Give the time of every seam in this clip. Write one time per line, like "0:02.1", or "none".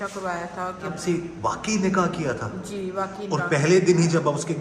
0:00.9